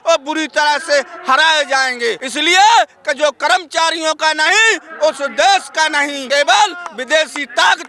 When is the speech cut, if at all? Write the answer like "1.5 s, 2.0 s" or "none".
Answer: 2.3 s, 6.2 s